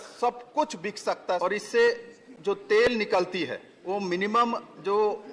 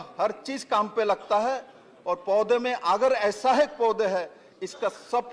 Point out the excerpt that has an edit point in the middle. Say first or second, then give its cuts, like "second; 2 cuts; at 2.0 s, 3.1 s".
first; 2 cuts; at 1.4 s, 3.7 s